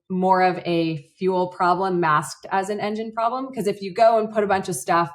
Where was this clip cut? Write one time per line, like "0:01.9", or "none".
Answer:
none